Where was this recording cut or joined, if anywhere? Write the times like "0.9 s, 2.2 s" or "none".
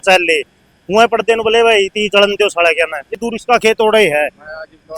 3.2 s